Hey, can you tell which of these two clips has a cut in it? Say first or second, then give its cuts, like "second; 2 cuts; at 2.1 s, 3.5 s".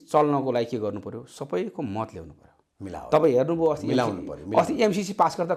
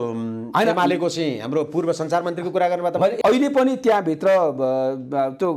second; 1 cut; at 3.2 s